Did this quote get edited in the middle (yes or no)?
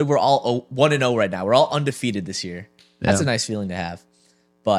no